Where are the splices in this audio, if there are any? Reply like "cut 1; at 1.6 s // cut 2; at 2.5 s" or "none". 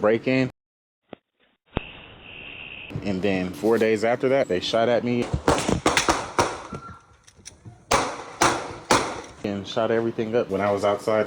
cut 1; at 3.5 s // cut 2; at 4.5 s